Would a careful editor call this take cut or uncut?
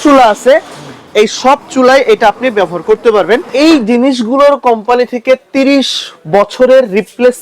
cut